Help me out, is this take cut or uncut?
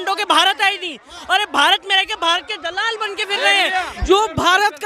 cut